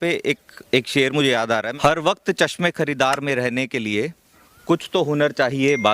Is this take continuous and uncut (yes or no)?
no